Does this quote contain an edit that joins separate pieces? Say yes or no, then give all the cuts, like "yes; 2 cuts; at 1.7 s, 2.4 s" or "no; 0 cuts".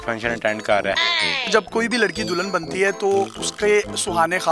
yes; 1 cut; at 1.0 s